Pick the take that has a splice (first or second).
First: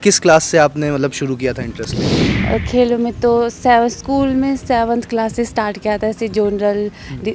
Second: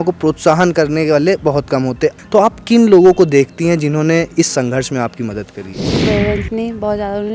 second